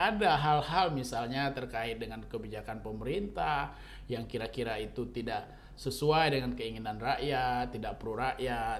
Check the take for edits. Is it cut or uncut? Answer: uncut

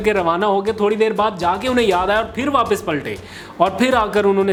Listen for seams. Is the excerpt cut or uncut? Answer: uncut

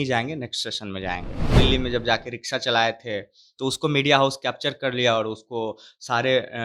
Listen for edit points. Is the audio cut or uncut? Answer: cut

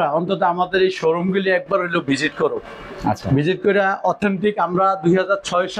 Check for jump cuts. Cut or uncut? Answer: uncut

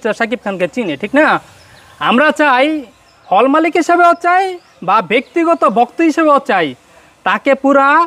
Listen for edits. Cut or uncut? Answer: uncut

